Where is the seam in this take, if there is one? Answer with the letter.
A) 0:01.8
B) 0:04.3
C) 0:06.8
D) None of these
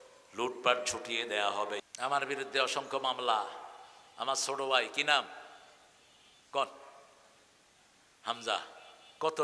A